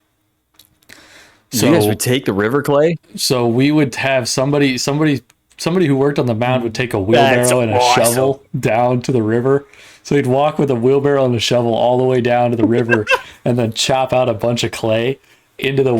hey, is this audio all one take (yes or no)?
yes